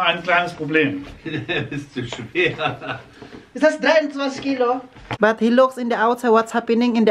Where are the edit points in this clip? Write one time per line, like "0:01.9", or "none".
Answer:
0:05.0

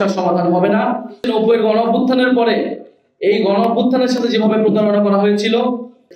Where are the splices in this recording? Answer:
0:01.3

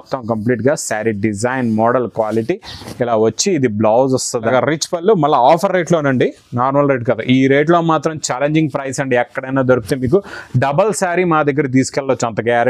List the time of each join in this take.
0:04.4

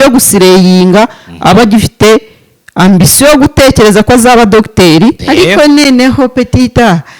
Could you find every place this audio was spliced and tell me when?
0:05.2

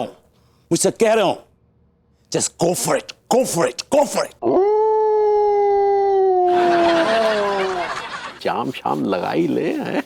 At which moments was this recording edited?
0:04.3
0:08.4

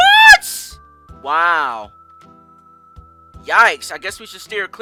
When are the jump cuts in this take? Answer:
none

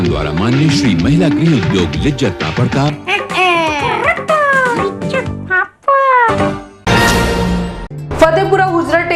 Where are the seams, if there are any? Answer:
0:06.8

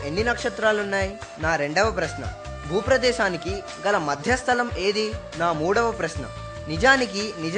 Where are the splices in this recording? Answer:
0:01.2
0:05.2

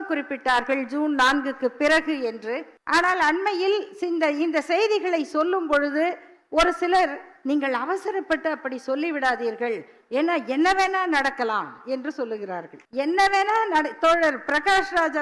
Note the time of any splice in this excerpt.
0:02.7
0:12.8

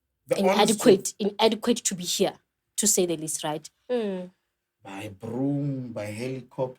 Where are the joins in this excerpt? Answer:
0:03.7

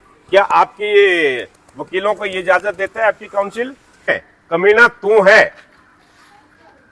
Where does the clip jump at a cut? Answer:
0:04.2

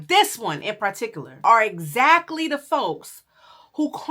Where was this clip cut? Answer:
0:01.2

